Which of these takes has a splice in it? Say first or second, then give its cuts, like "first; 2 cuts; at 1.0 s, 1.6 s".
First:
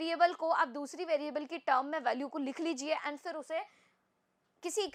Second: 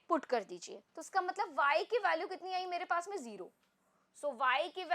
second; 1 cut; at 0.9 s